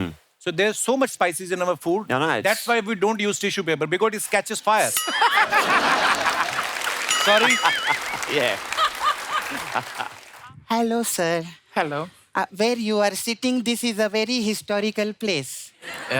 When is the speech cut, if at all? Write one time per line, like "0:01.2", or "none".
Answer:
0:10.2

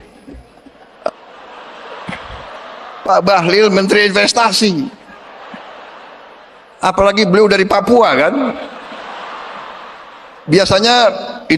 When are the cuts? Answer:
none

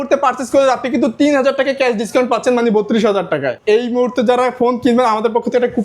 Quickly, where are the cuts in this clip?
0:03.5

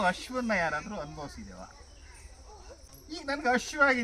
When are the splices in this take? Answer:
0:02.9

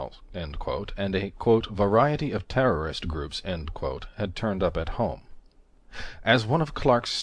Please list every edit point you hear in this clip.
0:04.1

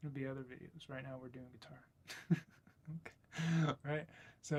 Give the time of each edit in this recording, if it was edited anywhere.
none

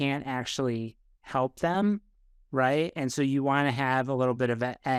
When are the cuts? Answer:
none

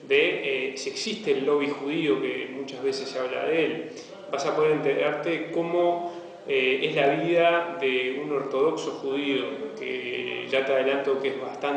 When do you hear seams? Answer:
none

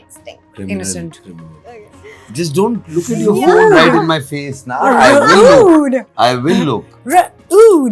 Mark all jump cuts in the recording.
0:01.5
0:02.8

